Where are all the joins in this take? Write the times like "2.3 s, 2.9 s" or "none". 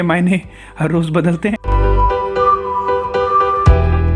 1.6 s